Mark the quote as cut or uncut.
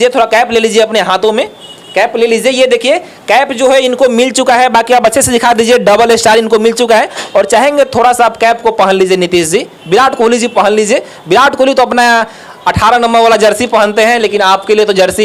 uncut